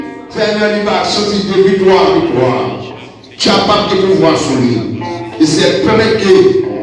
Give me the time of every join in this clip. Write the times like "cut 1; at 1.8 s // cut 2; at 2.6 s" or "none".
none